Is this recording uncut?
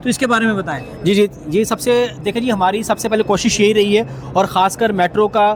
yes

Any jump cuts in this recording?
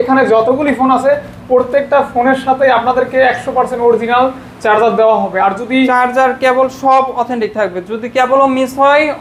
no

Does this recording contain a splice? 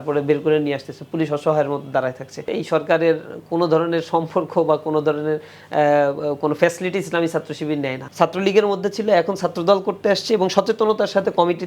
yes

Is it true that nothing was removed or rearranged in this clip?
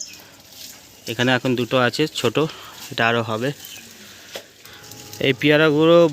no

